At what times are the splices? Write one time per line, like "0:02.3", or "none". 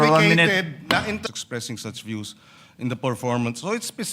0:01.4